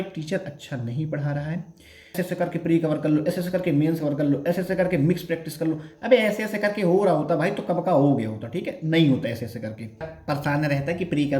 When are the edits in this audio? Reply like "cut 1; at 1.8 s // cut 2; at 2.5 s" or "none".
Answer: cut 1; at 2.2 s // cut 2; at 10.1 s